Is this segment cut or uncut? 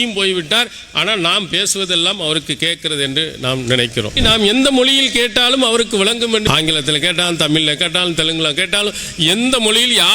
cut